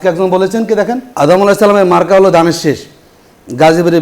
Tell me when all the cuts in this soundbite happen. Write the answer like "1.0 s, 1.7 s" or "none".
1.1 s

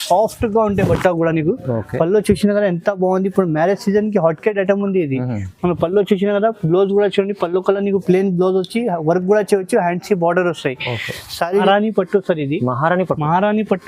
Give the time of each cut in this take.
11.6 s

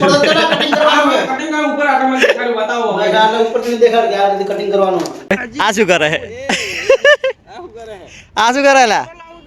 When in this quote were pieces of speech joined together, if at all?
5.3 s

